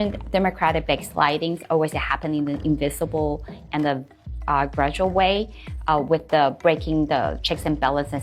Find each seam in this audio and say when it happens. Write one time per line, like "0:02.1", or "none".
none